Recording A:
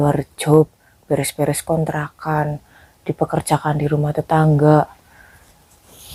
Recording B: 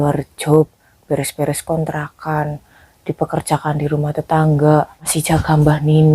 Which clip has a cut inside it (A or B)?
B